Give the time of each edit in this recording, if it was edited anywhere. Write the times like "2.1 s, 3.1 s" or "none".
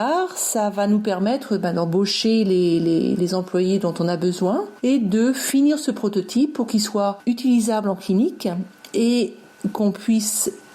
4.7 s, 7.2 s